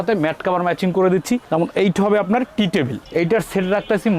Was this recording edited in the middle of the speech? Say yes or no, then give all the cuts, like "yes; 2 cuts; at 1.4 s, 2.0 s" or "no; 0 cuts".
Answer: yes; 1 cut; at 3.0 s